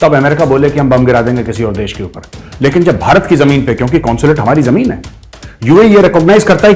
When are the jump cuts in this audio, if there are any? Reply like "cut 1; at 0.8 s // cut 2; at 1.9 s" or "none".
cut 1; at 5.5 s